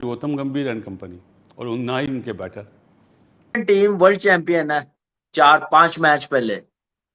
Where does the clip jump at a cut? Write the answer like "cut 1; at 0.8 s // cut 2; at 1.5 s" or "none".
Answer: cut 1; at 3.6 s